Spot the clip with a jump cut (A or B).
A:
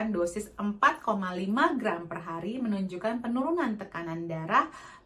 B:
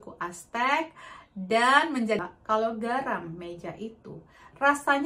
B